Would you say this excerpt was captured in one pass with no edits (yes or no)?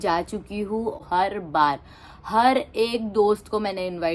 no